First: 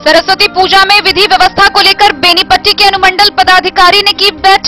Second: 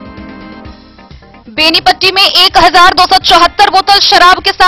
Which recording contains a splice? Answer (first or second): second